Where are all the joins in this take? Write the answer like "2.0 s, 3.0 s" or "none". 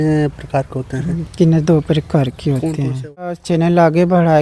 3.5 s